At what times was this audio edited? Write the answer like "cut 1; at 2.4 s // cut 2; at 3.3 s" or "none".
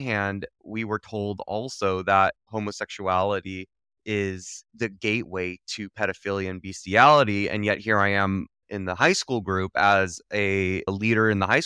none